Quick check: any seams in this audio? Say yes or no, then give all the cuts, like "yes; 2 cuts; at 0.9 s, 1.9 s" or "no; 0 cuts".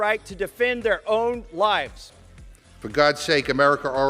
yes; 1 cut; at 2.2 s